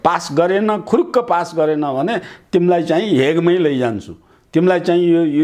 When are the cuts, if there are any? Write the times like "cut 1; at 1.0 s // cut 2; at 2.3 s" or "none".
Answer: none